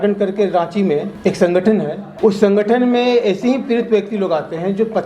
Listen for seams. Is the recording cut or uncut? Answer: cut